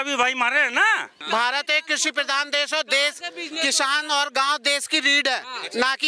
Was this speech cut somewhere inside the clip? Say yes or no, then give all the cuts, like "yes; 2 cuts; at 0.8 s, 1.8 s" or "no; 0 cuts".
yes; 1 cut; at 1.2 s